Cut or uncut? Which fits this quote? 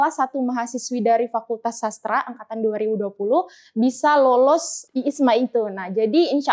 cut